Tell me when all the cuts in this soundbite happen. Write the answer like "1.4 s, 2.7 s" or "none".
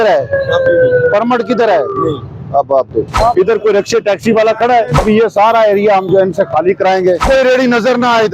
3.1 s, 4.9 s, 7.2 s

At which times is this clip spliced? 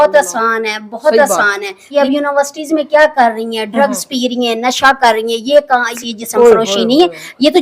1.9 s, 5.9 s

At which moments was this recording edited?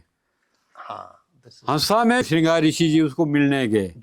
2.2 s

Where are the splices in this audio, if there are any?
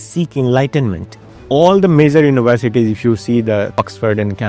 1.4 s, 3.8 s

